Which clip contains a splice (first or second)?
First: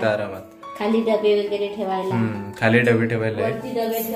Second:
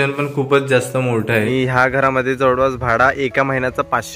second